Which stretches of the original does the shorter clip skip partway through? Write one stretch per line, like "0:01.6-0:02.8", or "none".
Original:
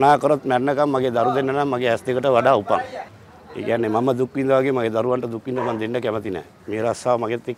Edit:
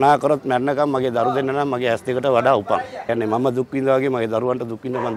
0:03.0-0:03.6